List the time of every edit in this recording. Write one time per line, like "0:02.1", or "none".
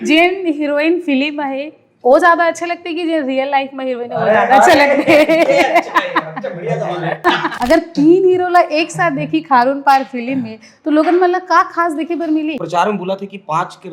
0:07.3
0:12.6